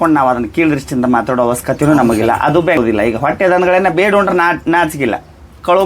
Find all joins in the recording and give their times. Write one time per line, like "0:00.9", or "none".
0:02.8